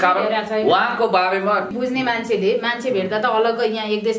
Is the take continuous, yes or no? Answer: no